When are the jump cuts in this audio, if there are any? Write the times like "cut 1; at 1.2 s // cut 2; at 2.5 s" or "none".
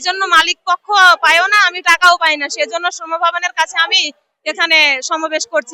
none